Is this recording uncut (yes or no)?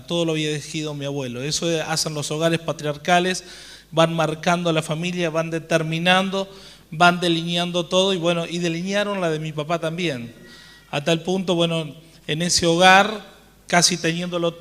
no